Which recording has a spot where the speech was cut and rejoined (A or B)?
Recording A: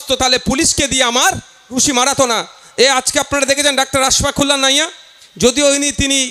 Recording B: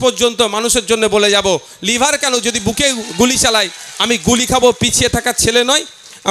A